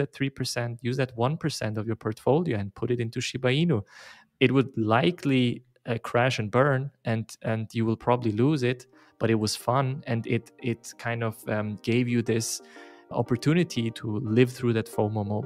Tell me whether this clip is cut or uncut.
cut